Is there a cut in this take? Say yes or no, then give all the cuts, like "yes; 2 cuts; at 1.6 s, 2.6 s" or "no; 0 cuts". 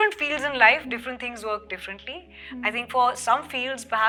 no; 0 cuts